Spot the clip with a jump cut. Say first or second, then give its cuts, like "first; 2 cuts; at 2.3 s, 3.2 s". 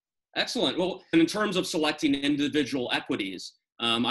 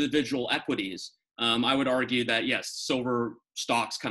first; 1 cut; at 1.1 s